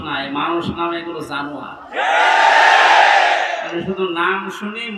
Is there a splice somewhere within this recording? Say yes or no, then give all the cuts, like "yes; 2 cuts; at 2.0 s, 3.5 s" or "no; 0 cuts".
no; 0 cuts